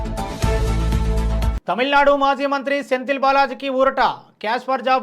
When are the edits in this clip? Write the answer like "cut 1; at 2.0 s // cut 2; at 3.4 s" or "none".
cut 1; at 1.5 s